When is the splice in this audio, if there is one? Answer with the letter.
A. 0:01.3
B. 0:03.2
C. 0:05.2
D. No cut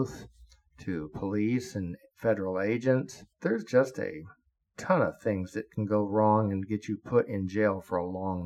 B